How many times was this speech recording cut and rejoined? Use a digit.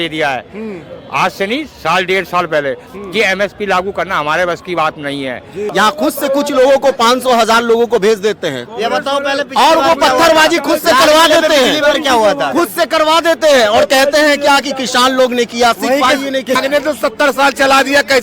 2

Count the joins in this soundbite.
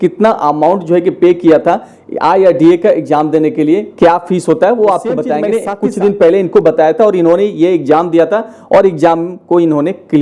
1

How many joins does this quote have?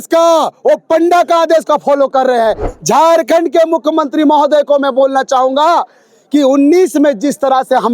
1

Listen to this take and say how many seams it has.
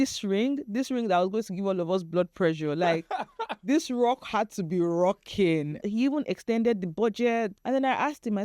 2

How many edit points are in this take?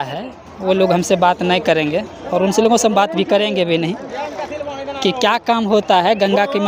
0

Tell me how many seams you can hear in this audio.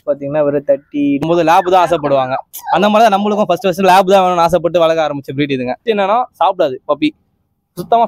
2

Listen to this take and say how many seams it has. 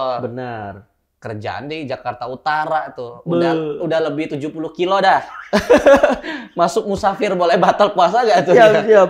0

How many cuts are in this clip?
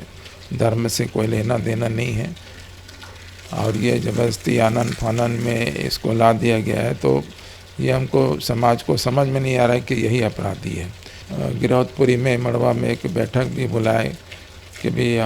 0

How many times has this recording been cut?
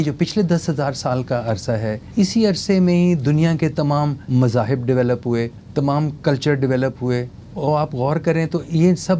4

